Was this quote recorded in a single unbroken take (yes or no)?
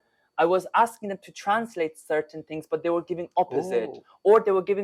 yes